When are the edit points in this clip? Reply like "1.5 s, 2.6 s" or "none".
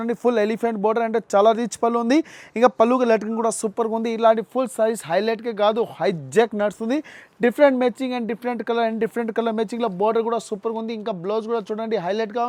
none